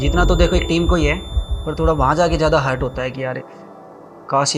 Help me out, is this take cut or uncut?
uncut